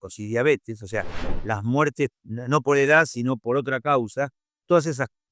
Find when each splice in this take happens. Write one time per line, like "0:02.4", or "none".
0:02.2